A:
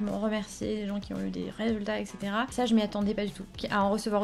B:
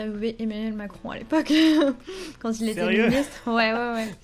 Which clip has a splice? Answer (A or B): A